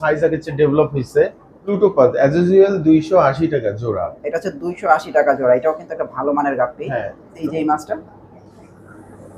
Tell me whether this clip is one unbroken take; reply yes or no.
no